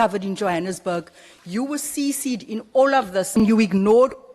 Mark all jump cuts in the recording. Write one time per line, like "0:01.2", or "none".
0:03.4